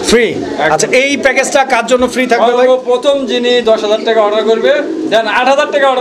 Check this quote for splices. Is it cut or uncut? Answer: uncut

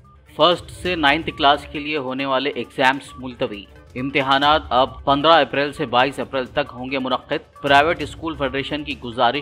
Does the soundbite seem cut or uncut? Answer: uncut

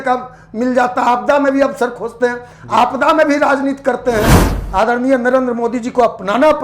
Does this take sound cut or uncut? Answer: cut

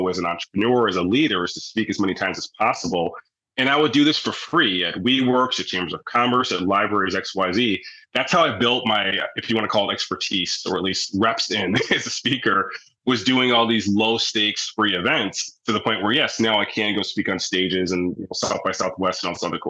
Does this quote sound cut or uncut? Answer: uncut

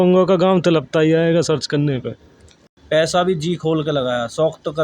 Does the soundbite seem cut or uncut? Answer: cut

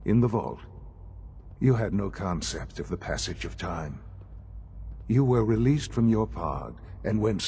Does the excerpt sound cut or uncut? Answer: uncut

